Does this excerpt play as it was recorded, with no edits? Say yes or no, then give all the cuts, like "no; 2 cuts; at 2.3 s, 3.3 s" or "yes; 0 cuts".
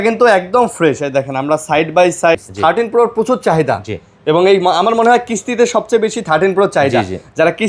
no; 1 cut; at 2.4 s